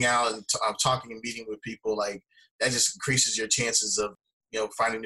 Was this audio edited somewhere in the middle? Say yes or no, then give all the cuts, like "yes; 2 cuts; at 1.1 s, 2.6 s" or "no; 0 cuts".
yes; 1 cut; at 4.1 s